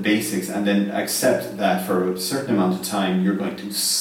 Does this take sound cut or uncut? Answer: uncut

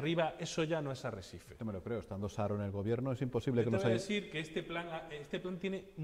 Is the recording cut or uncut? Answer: uncut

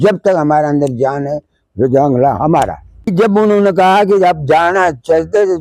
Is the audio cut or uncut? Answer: cut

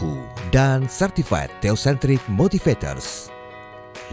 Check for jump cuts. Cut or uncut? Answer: uncut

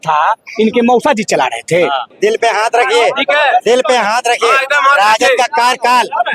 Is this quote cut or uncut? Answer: cut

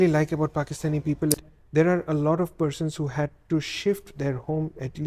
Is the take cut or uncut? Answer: cut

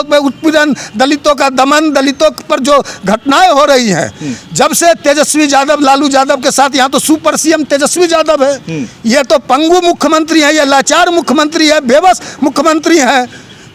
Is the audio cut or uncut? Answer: uncut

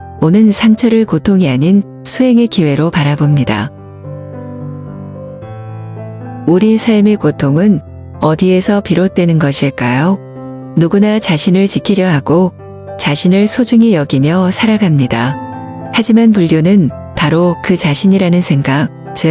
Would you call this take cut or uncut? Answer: cut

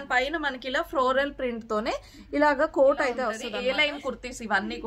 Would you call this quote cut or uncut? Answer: cut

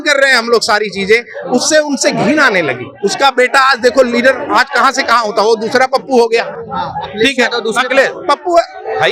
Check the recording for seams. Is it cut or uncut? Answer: uncut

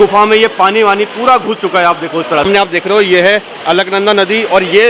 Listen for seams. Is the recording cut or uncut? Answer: cut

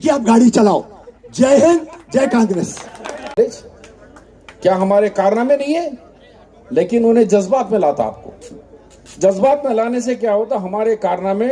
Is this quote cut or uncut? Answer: cut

